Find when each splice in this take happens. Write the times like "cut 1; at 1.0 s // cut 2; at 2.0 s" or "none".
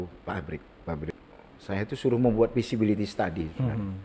cut 1; at 1.1 s